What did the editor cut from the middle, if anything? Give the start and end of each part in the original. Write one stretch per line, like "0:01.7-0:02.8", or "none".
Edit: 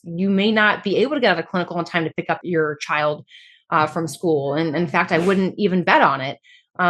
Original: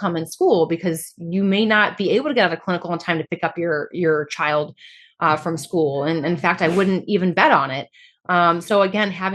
0:03.5-0:03.9

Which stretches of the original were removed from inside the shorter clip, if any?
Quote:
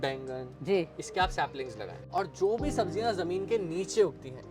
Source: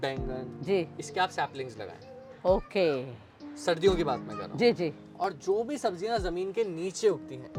0:02.0-0:05.0

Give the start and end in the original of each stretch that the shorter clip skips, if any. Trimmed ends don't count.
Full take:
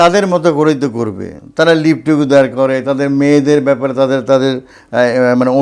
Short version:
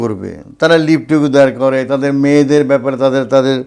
none

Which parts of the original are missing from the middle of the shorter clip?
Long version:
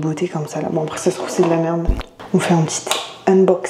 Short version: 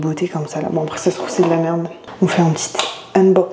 0:02.0-0:02.1

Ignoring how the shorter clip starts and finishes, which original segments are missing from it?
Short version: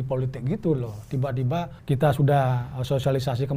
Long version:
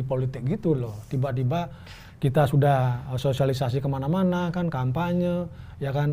0:01.8-0:02.1

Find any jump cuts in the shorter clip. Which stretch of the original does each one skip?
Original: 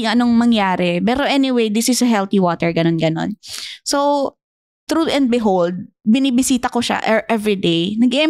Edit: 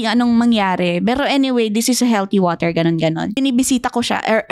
0:03.4-0:06.2

